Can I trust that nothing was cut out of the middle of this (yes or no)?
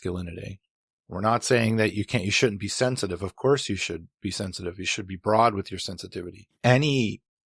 yes